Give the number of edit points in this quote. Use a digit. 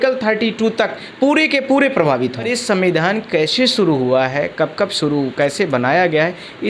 1